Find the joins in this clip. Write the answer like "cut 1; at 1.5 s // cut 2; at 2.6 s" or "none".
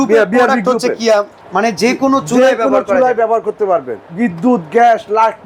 cut 1; at 1.4 s // cut 2; at 4.0 s